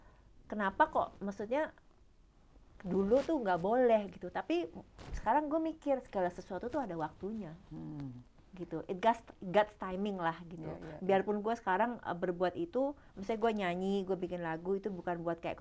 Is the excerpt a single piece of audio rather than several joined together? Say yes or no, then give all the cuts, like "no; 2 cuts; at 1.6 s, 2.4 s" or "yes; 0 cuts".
yes; 0 cuts